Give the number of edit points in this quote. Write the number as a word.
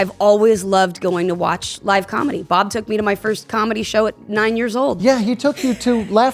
zero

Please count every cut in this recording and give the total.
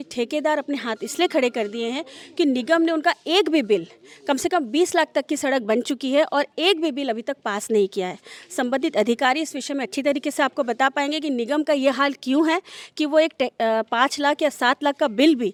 zero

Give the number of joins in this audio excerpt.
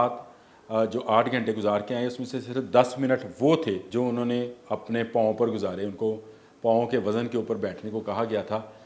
one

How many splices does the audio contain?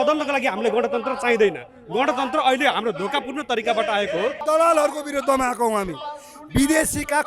one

